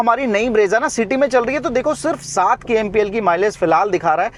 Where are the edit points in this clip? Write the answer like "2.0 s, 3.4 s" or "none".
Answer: none